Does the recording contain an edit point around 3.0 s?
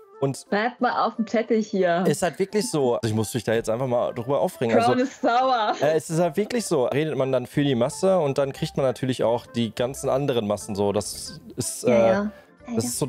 yes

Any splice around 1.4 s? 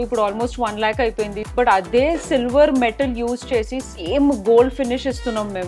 yes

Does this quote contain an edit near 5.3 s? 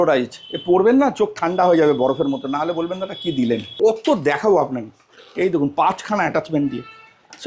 no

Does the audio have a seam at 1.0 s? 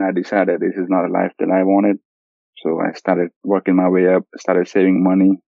no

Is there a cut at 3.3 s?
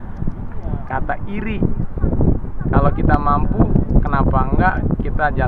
no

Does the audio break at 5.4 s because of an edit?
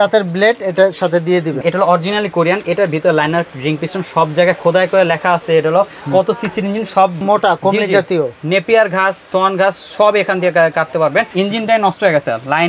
no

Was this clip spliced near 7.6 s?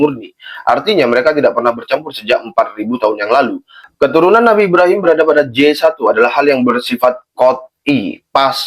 no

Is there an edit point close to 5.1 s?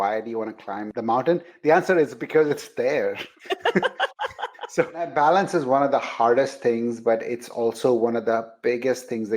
yes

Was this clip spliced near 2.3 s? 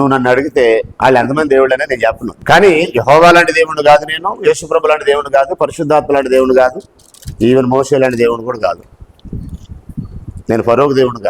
yes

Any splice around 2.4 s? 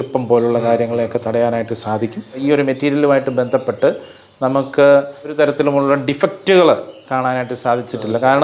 yes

